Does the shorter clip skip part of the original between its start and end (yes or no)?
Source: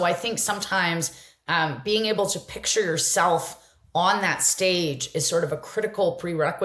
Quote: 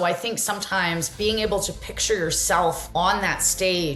yes